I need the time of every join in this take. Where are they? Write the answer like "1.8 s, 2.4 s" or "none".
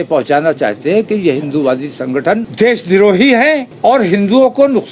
2.5 s, 3.7 s